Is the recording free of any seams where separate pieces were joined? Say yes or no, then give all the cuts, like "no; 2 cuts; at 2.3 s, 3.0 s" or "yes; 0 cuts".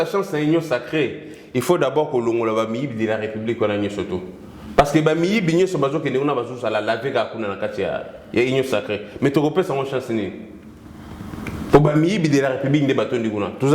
yes; 0 cuts